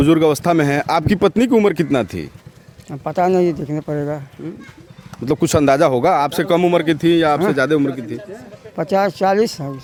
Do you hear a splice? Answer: no; 0 cuts

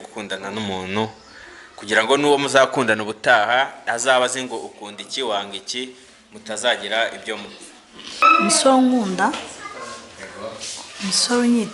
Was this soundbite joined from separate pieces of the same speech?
yes; 1 cut; at 8.2 s

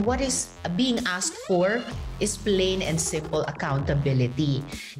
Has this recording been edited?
no; 0 cuts

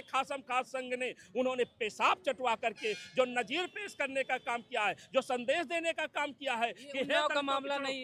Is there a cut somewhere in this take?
no; 0 cuts

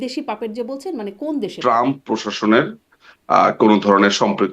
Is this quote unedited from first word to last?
no; 1 cut; at 1.5 s

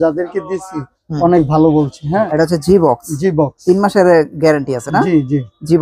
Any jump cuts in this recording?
yes; 1 cut; at 2.3 s

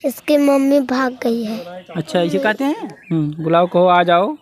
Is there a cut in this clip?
yes; 1 cut; at 2.9 s

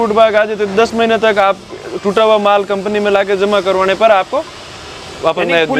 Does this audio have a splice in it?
no; 0 cuts

